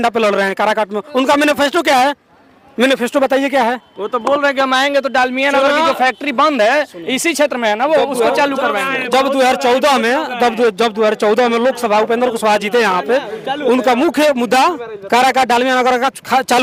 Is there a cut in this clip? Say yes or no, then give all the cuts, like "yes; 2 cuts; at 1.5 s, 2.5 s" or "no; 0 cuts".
no; 0 cuts